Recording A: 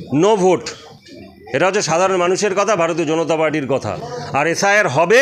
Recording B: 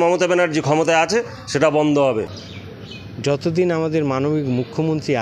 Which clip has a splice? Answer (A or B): B